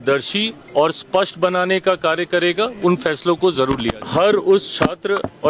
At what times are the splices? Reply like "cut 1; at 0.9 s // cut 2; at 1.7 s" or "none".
cut 1; at 4.0 s